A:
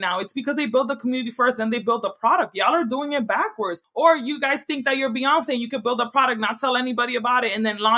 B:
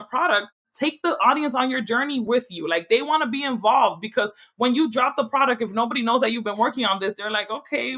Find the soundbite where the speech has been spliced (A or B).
A